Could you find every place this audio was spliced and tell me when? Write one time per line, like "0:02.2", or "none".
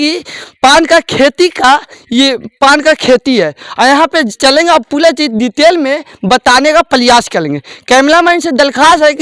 none